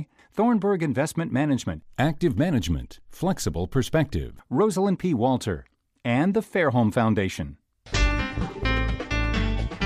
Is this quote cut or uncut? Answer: cut